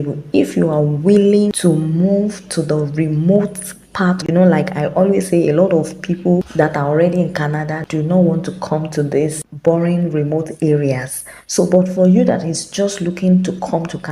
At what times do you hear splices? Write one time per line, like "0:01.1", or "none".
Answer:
0:01.6
0:04.2
0:06.5
0:07.8